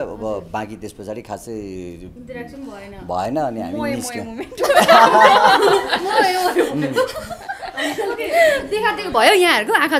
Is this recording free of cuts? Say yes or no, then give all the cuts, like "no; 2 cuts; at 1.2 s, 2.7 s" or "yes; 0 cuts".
yes; 0 cuts